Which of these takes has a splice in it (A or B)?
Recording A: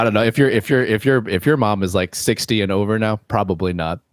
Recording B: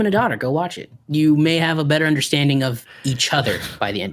B